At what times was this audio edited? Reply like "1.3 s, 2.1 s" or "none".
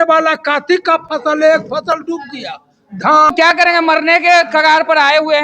3.3 s